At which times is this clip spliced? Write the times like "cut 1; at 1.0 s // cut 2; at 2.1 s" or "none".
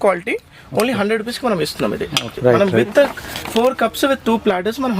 cut 1; at 2.3 s